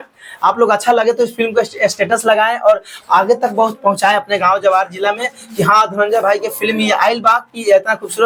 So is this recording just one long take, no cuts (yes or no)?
yes